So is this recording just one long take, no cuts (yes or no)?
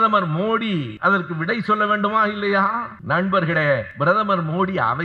no